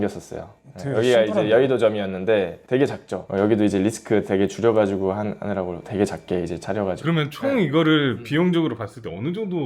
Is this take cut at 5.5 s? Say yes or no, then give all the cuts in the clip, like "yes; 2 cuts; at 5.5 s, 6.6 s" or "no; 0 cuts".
no; 2 cuts; at 3.2 s, 7.0 s